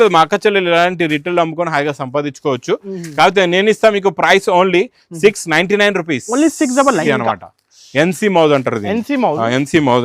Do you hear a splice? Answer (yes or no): yes